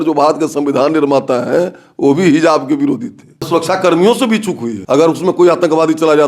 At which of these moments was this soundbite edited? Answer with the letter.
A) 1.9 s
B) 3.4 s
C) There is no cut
B